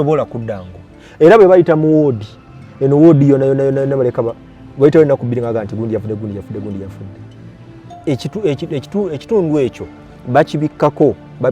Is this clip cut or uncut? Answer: cut